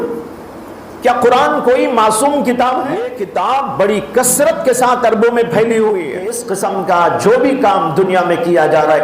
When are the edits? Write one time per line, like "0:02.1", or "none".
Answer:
0:03.2
0:06.4